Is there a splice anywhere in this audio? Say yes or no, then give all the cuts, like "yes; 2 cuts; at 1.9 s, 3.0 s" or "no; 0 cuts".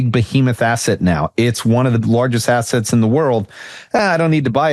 no; 0 cuts